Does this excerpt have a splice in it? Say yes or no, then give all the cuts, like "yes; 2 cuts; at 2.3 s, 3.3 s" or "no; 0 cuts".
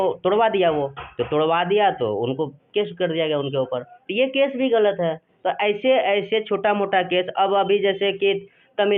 no; 0 cuts